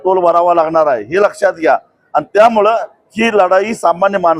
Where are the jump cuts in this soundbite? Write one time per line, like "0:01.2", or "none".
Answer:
none

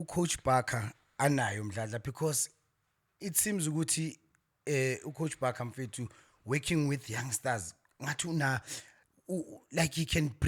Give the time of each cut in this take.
none

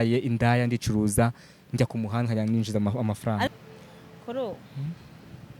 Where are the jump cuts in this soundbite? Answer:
0:03.5

